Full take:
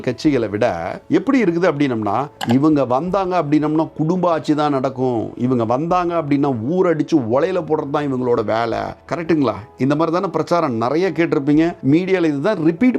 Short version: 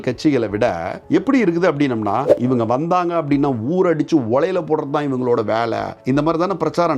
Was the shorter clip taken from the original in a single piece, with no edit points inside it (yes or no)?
no